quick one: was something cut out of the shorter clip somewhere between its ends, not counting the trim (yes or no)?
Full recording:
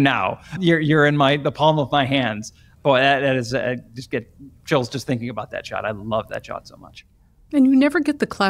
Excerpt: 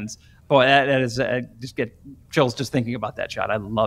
no